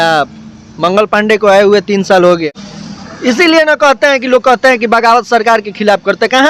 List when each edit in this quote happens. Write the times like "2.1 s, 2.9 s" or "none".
2.4 s